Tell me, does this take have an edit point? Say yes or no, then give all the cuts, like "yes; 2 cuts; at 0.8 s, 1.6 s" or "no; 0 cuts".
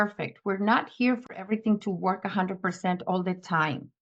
no; 0 cuts